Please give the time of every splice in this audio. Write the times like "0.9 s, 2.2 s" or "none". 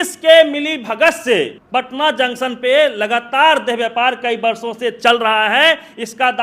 1.6 s